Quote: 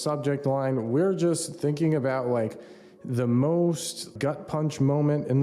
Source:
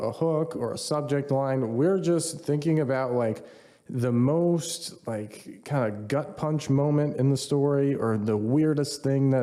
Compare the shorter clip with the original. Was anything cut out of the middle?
yes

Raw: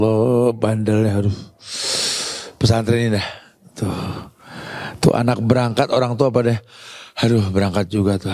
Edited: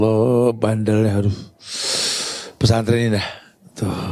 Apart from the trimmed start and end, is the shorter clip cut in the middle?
no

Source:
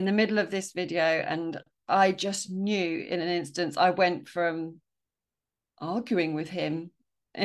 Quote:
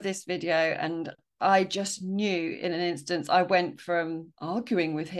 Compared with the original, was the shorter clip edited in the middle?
yes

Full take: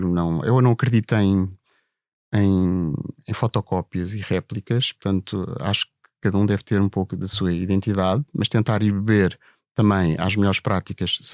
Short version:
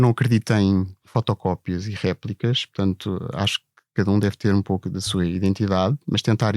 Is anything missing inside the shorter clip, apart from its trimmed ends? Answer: yes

